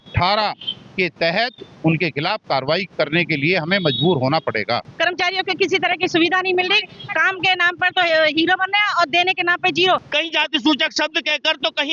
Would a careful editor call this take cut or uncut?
cut